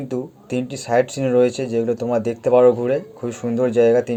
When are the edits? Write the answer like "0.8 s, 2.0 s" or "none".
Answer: none